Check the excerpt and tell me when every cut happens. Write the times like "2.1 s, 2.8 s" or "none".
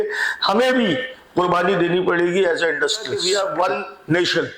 3.2 s